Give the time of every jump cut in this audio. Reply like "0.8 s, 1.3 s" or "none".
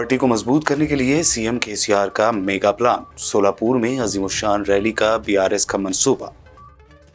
none